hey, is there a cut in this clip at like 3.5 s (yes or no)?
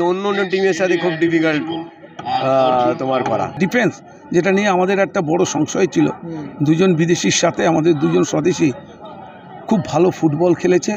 yes